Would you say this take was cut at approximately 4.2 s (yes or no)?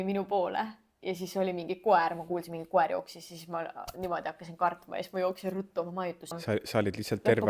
no